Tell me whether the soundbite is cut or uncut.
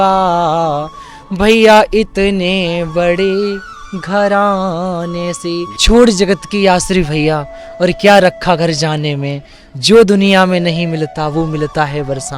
cut